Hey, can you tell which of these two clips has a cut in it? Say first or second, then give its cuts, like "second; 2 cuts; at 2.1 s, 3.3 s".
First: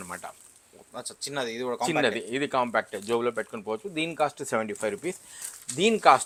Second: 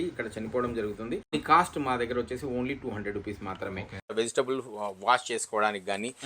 second; 2 cuts; at 1.3 s, 4.1 s